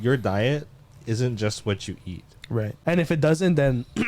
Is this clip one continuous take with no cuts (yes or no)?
no